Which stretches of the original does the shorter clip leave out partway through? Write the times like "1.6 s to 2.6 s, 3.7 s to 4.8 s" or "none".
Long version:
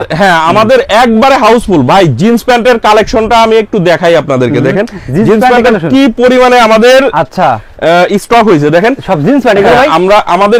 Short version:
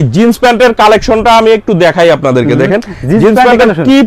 none

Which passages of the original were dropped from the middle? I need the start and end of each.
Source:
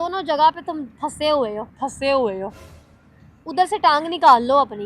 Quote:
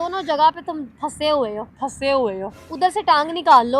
2.6 s to 3.3 s

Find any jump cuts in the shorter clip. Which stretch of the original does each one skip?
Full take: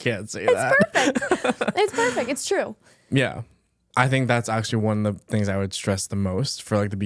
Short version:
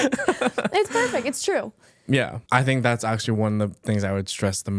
3.4 s to 3.8 s

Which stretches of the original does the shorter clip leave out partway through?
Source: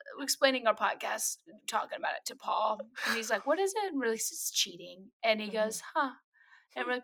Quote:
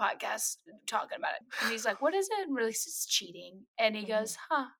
2.3 s to 2.9 s

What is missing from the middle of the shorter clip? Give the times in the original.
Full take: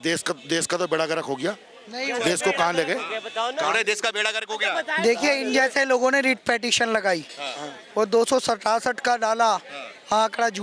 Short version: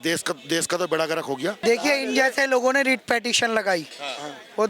1.6 s to 5.0 s

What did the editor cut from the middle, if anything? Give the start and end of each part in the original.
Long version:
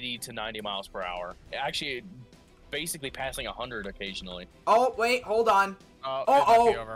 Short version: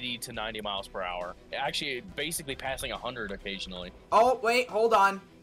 2.1 s to 2.6 s

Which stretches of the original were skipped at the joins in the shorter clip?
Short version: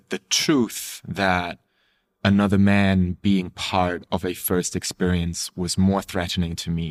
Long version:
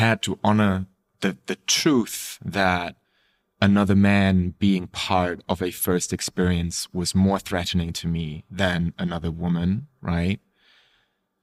none

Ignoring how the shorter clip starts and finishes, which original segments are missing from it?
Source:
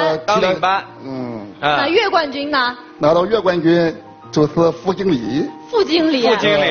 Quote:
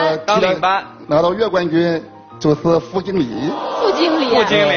0.9 s to 2.9 s

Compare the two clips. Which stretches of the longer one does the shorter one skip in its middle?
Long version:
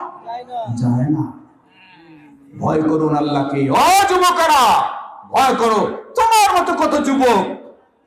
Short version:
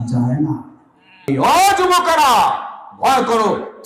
1.9 s to 3.6 s

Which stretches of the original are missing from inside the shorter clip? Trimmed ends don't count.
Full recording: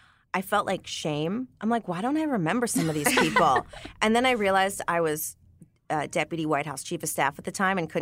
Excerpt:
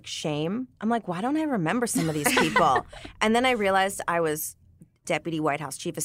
5.8 s to 6.1 s

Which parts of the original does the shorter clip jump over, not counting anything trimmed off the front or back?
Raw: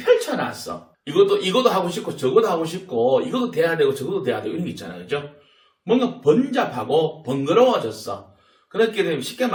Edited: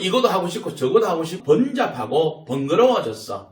2.8 s to 6.2 s

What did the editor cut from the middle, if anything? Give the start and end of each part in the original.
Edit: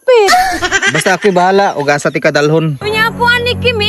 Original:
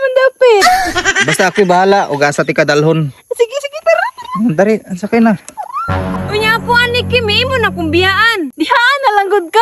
3.1 s to 6.3 s

